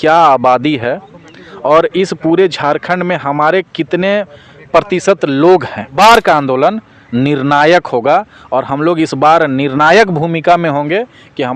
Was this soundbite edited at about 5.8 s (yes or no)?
yes